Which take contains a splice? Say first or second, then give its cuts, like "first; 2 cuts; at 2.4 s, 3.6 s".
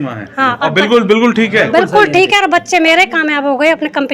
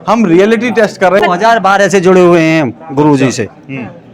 second; 1 cut; at 1.0 s